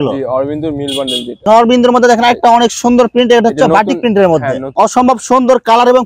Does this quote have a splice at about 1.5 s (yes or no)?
yes